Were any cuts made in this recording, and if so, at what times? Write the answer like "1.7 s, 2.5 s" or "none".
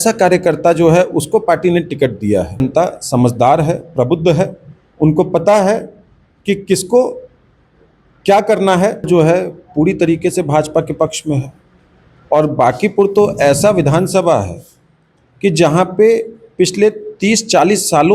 2.6 s, 9.1 s